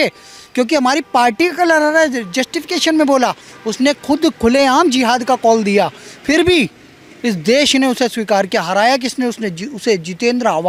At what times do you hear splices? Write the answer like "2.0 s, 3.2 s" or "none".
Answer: none

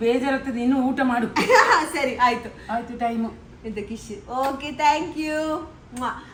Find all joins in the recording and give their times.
none

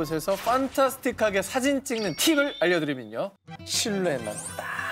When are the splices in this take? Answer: 3.6 s

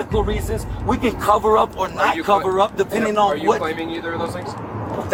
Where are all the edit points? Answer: none

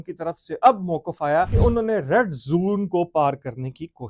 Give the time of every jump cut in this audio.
1.5 s

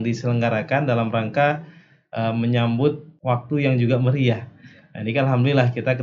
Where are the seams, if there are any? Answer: 3.1 s

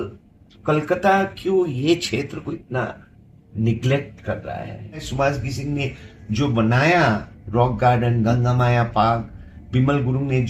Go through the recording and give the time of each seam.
5.1 s

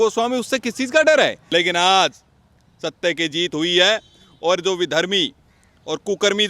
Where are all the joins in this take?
1.4 s

